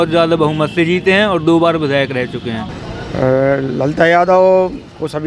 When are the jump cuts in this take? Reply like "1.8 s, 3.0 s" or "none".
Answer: 2.7 s